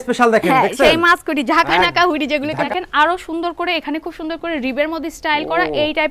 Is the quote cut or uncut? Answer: cut